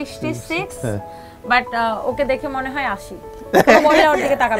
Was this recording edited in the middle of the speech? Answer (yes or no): no